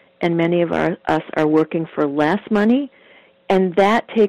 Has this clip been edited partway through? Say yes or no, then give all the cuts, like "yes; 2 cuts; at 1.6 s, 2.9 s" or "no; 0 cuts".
yes; 1 cut; at 3.2 s